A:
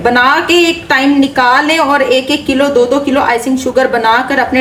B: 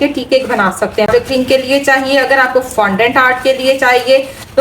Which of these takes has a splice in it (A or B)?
B